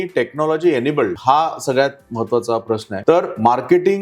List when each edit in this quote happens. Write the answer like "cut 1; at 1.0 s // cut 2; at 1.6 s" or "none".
cut 1; at 1.2 s // cut 2; at 2.9 s